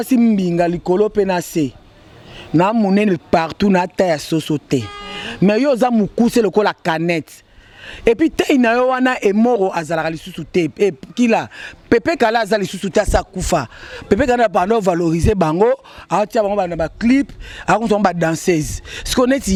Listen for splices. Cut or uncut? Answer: uncut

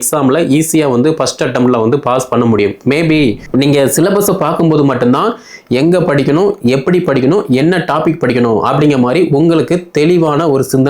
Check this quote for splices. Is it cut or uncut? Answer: cut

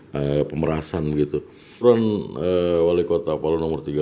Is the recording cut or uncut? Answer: cut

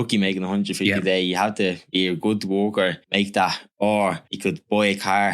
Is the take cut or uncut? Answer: cut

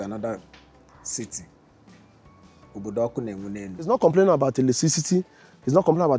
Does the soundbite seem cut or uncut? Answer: cut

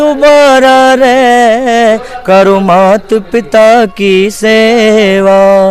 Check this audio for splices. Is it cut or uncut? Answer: uncut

